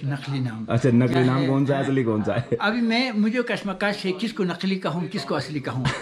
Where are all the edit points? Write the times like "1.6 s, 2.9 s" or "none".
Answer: none